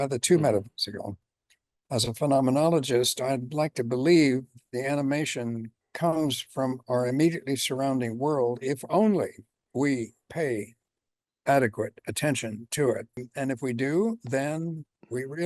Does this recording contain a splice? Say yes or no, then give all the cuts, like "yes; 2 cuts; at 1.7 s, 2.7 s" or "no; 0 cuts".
yes; 2 cuts; at 5.8 s, 13.2 s